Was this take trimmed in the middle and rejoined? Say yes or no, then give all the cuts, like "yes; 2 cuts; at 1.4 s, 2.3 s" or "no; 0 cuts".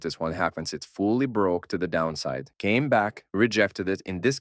no; 0 cuts